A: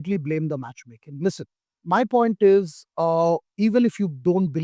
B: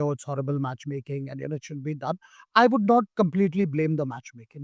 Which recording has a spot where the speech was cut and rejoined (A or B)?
A